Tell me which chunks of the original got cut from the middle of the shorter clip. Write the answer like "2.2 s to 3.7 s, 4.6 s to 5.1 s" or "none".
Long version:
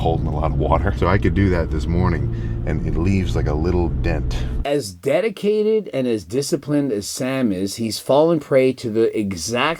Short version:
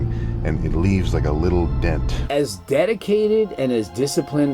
4.4 s to 4.5 s